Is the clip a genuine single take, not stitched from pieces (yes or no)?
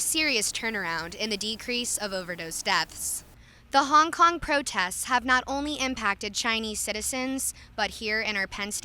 no